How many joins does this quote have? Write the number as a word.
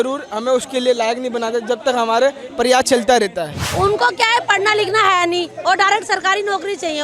one